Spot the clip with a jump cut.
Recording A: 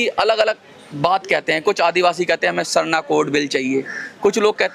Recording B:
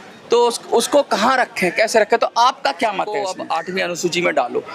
B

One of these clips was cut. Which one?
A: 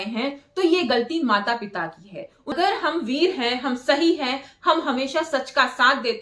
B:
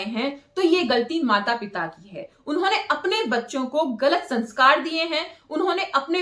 A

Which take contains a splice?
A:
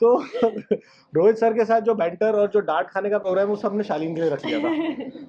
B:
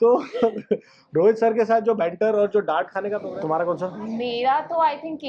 B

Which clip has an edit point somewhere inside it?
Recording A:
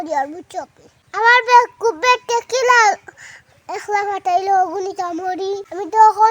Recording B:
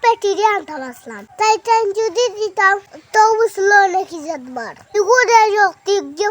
B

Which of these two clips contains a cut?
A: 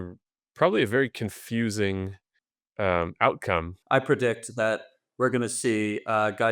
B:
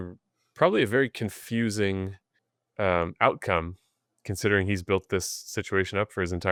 A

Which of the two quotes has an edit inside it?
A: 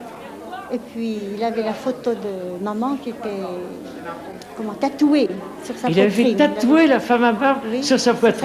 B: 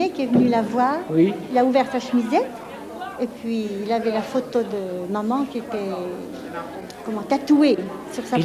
B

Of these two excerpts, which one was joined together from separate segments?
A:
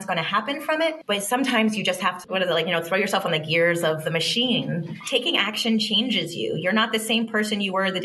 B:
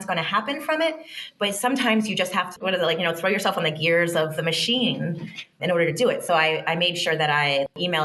A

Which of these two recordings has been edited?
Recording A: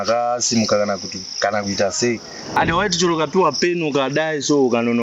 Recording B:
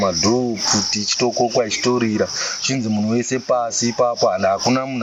A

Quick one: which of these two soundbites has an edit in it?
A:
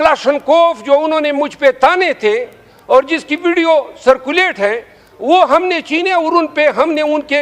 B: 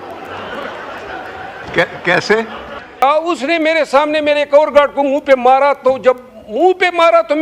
B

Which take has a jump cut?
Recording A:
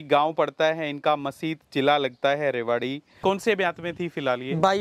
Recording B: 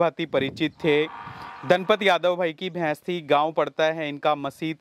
A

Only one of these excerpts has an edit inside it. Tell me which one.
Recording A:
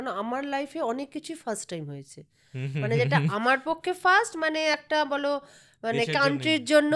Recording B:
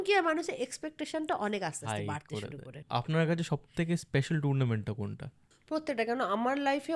B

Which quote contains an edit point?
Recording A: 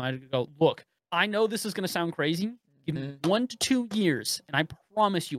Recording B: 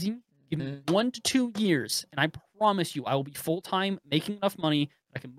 A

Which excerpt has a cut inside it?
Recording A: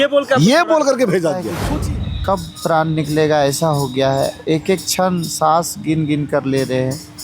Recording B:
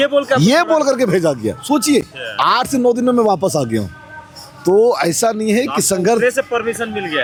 A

